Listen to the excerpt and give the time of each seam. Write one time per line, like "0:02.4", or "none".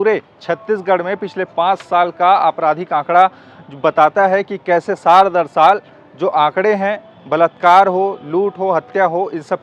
none